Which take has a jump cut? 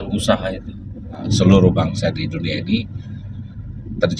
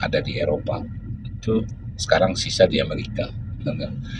first; 1 cut; at 1.2 s

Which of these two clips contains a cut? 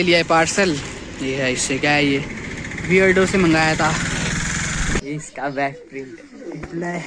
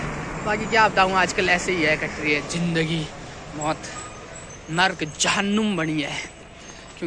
first; 1 cut; at 5.0 s

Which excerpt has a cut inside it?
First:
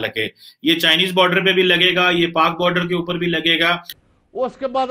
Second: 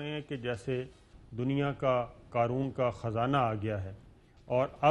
first; 1 cut; at 3.8 s

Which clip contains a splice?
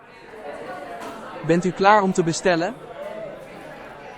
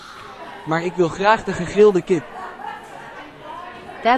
first; 2 cuts; at 1.4 s, 2.7 s

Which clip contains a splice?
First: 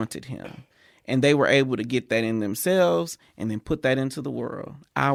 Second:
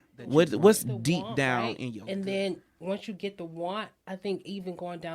second; 1 cut; at 1.7 s

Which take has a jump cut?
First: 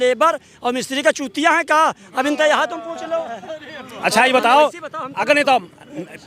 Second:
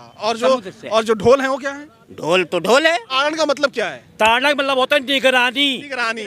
second; 1 cut; at 3.2 s

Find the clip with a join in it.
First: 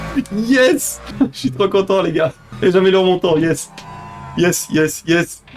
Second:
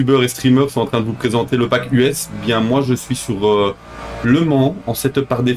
first; 2 cuts; at 1.0 s, 2.5 s

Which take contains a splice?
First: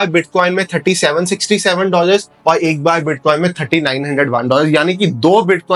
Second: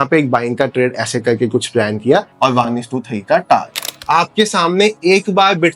second; 2 cuts; at 2.3 s, 3.9 s

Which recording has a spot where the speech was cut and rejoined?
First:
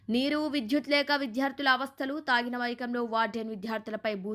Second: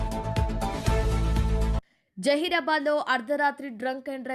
second; 1 cut; at 1.7 s

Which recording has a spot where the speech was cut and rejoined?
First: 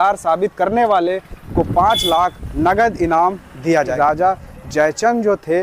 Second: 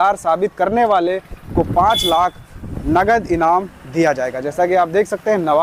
first; 2 cuts; at 2.4 s, 3.9 s

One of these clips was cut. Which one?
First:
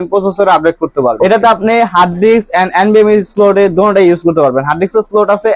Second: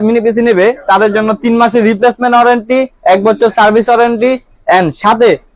first; 1 cut; at 1.2 s

